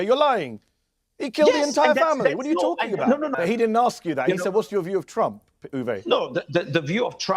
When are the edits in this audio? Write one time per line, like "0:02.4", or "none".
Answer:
0:03.3